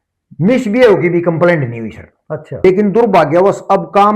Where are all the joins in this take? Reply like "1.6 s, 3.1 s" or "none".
2.6 s